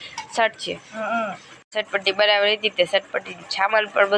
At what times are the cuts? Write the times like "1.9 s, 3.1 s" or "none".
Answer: 1.6 s